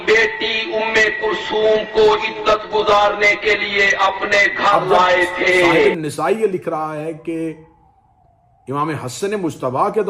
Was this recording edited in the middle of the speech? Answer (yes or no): yes